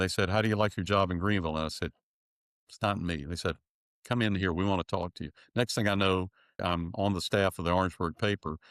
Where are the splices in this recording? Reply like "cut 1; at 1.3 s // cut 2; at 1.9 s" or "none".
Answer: cut 1; at 6.6 s